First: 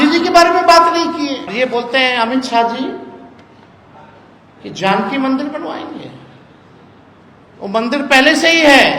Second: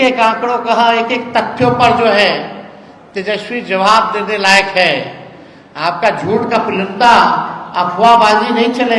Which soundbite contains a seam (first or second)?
first